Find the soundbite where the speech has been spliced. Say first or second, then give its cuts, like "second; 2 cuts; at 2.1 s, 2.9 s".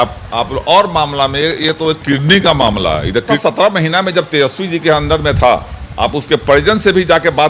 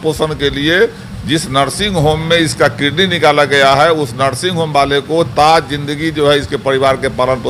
first; 1 cut; at 3.3 s